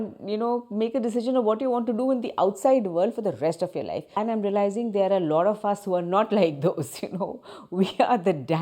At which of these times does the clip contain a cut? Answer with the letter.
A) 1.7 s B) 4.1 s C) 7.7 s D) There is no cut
B